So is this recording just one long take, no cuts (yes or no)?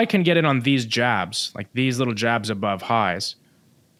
yes